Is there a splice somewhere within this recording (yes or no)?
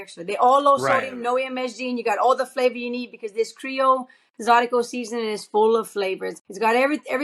yes